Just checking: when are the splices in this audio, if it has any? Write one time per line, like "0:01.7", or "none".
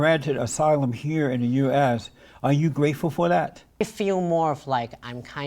0:03.8